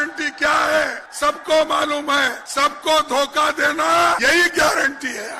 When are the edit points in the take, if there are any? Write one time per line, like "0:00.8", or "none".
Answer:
0:01.0
0:02.4
0:04.2